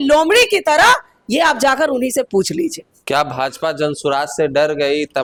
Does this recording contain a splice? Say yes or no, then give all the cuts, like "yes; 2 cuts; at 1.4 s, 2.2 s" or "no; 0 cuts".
no; 0 cuts